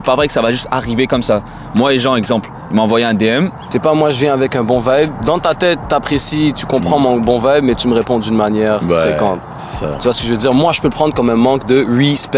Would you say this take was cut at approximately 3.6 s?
yes; 1 cut; at 3.6 s

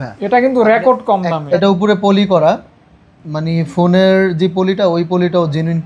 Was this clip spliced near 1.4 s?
yes; 1 cut; at 1.4 s

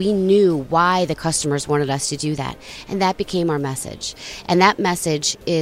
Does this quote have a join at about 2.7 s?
no; 0 cuts

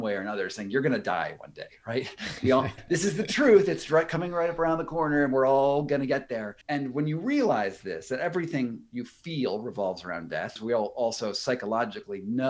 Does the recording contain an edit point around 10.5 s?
yes; 3 cuts; at 2.8 s, 6.5 s, 10.5 s

